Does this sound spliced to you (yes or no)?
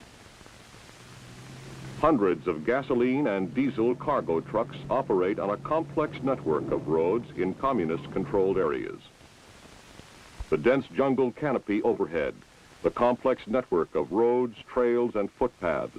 no